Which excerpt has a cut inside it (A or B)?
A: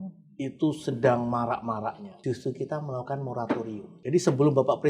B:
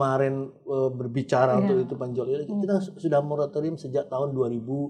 A